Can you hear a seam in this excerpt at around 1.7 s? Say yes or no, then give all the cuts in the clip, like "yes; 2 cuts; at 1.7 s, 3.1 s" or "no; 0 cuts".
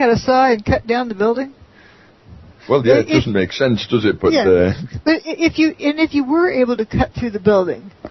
no; 1 cut; at 6.3 s